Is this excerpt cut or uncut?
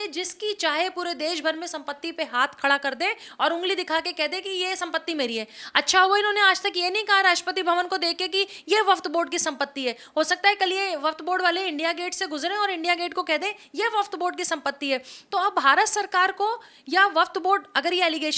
uncut